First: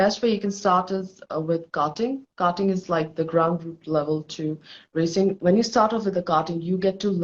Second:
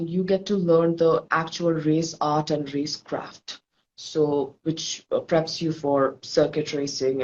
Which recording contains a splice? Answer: first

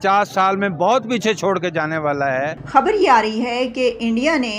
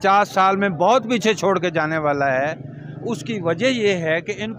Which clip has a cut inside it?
first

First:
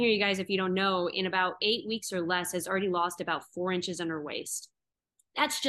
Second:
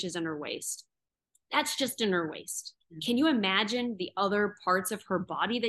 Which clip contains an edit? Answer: second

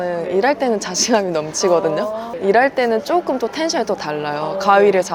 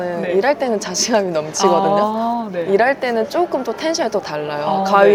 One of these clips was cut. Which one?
first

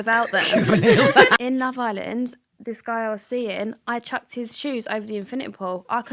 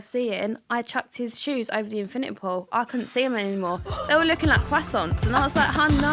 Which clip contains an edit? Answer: first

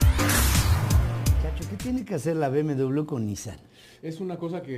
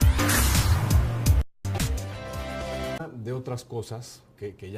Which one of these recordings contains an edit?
first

